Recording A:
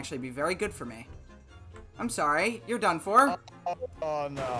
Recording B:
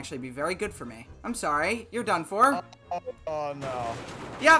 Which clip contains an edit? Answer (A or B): B